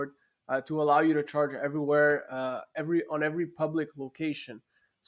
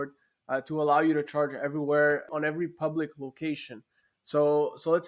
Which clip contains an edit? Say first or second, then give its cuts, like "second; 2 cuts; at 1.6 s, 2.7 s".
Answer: second; 1 cut; at 2.3 s